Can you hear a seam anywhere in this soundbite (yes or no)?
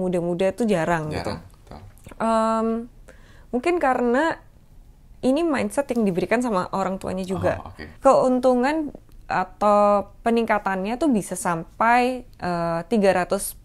yes